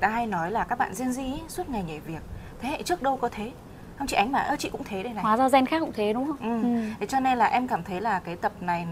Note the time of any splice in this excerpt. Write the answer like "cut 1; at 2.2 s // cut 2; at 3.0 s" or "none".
none